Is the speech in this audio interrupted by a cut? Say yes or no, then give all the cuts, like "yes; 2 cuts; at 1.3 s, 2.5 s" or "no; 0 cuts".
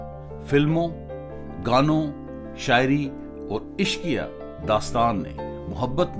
no; 0 cuts